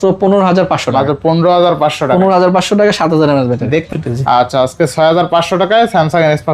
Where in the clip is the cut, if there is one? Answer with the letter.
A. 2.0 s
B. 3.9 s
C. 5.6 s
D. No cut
B